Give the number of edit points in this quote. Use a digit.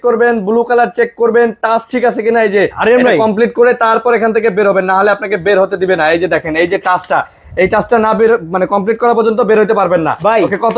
0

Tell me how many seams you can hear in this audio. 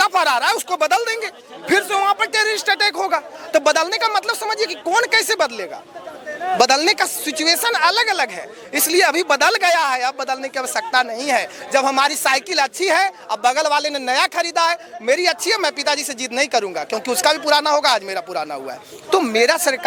0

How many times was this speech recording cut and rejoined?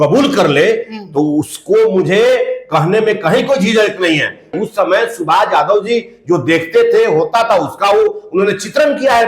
1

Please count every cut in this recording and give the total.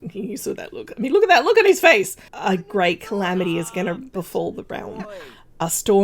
1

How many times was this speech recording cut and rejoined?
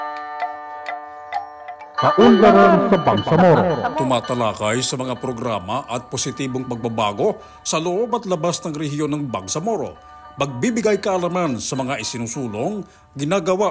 1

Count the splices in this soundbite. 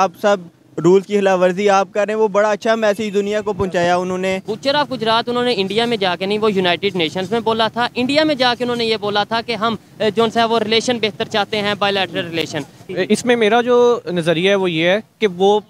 2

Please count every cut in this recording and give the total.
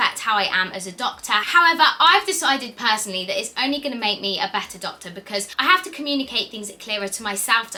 0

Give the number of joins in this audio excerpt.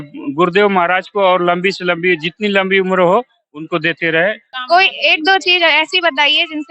1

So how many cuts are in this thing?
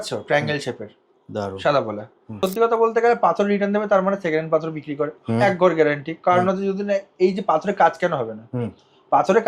1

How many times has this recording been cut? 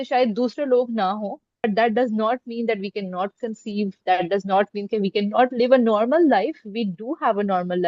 1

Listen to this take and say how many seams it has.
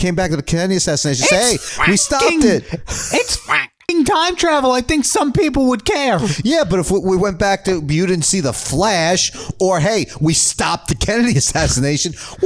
0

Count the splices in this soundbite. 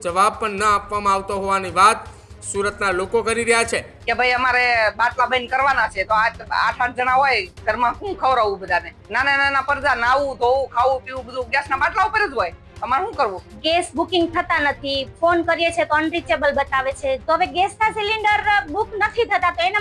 4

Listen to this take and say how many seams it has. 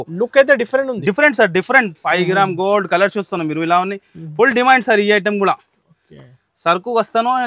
1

